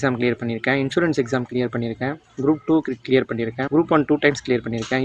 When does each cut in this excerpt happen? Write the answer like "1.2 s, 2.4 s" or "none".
3.6 s